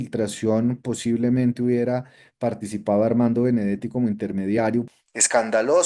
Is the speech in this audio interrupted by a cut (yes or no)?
yes